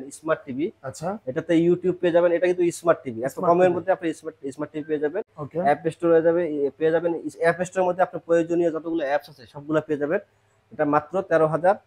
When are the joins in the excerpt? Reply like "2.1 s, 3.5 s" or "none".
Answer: none